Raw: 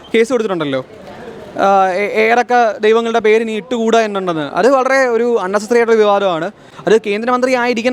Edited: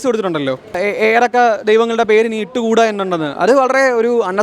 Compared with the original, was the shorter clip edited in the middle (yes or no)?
yes